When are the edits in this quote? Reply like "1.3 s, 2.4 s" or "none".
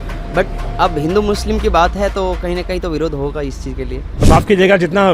4.1 s